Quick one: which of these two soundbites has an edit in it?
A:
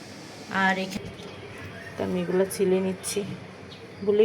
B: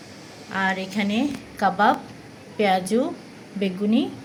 A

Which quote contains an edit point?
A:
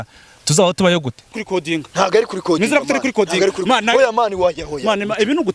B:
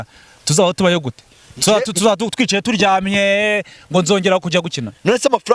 A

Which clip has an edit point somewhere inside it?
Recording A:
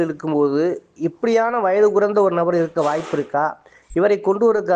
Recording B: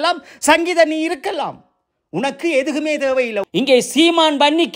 B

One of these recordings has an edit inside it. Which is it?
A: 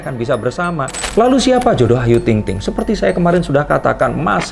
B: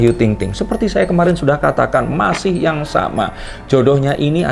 A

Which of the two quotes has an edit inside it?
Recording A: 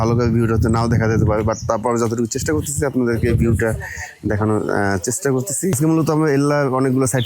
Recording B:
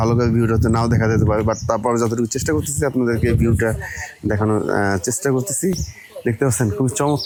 A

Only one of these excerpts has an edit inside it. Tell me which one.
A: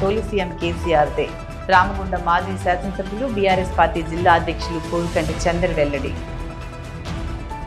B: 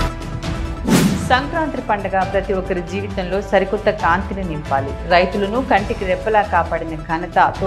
B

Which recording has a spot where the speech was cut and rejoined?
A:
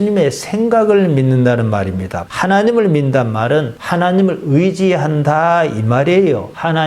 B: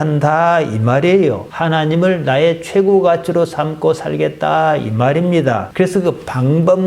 A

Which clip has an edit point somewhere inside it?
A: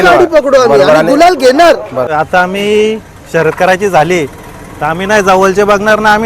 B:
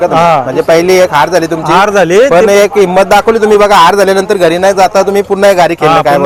A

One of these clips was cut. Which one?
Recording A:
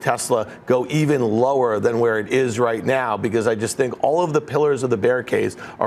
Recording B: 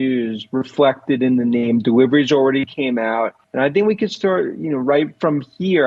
B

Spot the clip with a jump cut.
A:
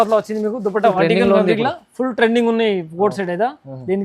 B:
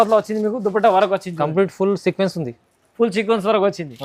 A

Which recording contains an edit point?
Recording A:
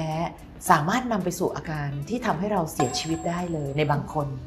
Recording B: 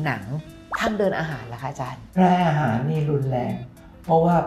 B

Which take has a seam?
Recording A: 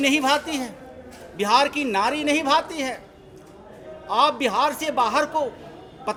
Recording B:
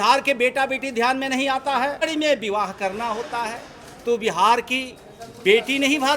B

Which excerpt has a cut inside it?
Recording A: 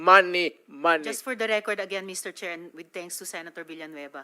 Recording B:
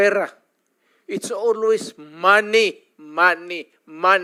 A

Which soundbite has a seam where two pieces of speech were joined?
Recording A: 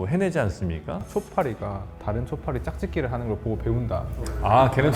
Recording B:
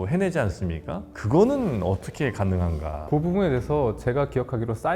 A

